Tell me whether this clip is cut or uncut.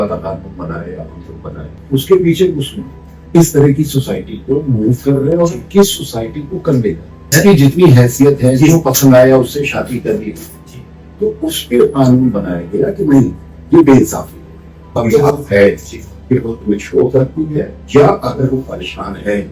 cut